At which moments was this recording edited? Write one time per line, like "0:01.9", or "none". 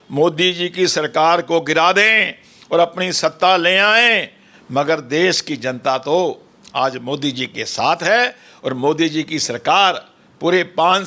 none